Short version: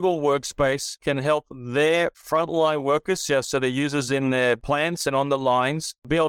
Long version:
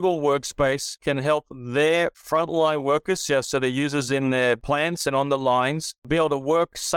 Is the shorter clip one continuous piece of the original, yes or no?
yes